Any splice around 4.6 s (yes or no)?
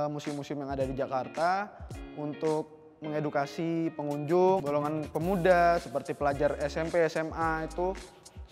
yes